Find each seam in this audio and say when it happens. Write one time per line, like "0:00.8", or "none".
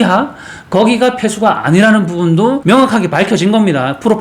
0:02.6